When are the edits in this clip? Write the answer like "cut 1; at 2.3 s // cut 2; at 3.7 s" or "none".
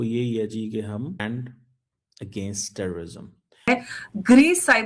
cut 1; at 1.2 s // cut 2; at 3.6 s